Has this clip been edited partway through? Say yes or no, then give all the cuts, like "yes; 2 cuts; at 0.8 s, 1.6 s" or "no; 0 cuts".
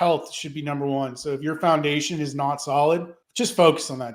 yes; 1 cut; at 3.2 s